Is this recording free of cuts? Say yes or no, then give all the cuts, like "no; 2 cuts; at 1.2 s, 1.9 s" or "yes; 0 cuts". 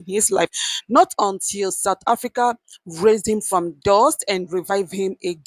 yes; 0 cuts